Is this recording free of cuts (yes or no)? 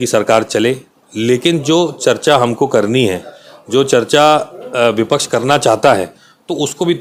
yes